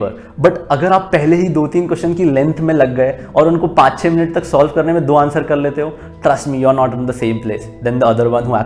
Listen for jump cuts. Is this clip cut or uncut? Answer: uncut